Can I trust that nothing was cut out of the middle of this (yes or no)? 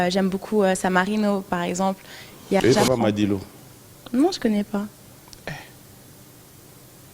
no